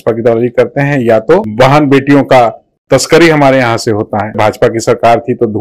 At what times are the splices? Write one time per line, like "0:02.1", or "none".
0:01.5
0:04.4